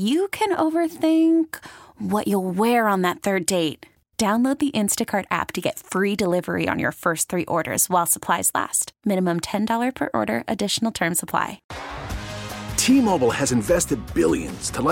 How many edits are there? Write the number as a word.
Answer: one